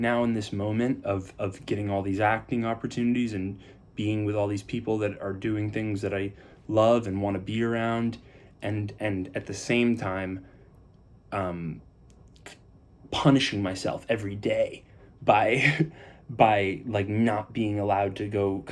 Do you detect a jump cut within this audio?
no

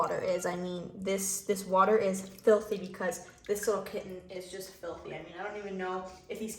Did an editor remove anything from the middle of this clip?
no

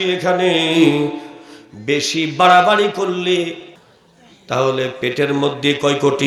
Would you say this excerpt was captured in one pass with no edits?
no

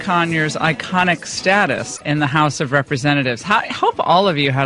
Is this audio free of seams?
yes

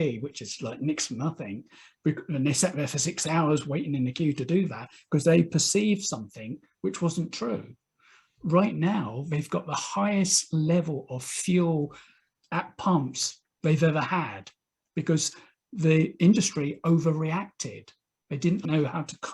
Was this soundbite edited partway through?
no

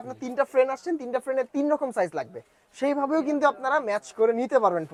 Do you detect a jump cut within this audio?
no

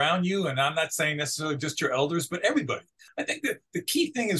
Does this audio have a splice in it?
yes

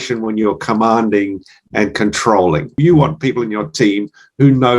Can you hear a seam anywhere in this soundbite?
yes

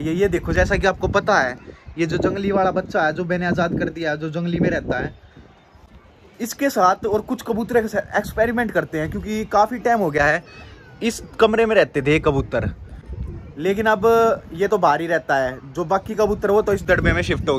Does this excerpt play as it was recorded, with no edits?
yes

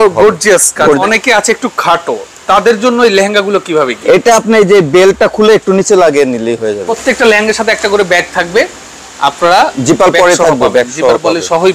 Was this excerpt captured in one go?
no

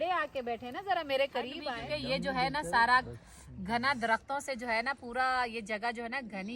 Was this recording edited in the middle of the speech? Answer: yes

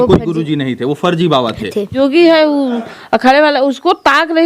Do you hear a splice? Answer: yes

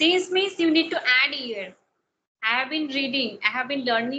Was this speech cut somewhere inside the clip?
no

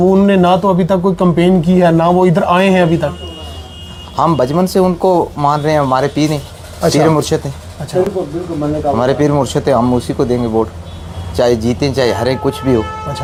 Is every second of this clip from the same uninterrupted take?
yes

